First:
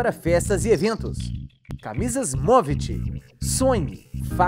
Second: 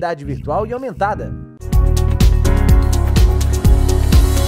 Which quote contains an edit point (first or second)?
second